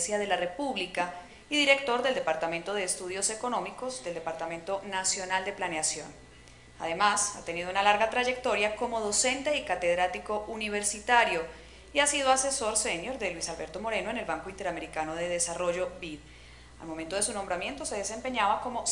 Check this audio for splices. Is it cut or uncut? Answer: cut